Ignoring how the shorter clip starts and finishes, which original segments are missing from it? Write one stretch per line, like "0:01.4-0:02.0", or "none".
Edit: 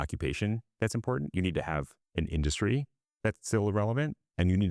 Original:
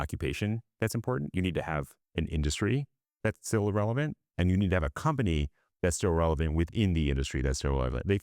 none